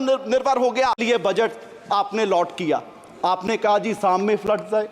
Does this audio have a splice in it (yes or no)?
yes